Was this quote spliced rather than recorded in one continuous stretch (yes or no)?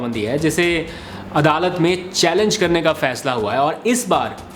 no